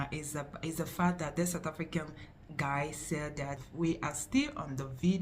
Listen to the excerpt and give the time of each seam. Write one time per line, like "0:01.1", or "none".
0:03.6